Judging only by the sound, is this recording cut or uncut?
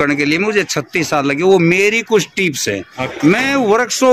uncut